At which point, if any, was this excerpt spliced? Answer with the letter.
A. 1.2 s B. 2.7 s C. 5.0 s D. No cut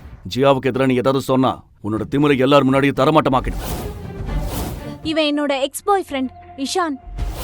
C